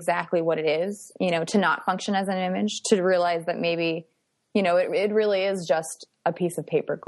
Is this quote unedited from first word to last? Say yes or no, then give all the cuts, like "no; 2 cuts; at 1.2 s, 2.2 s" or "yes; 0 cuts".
yes; 0 cuts